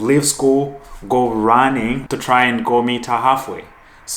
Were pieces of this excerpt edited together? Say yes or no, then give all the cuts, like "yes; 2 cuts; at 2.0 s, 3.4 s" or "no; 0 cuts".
yes; 1 cut; at 2.0 s